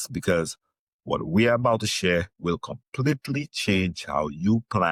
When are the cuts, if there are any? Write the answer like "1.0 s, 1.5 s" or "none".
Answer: none